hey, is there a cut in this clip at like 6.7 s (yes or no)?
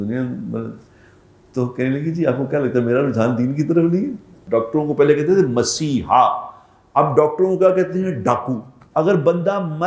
no